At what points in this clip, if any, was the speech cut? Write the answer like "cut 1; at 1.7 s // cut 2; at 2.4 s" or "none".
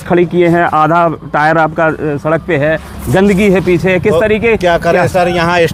none

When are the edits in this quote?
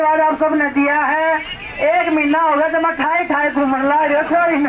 none

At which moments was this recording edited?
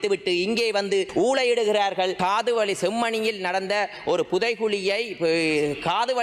cut 1; at 1.1 s // cut 2; at 2.2 s

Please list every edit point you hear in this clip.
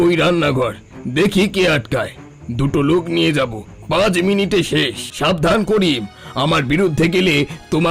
cut 1; at 5.0 s

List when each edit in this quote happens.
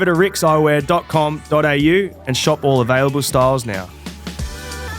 cut 1; at 4.1 s

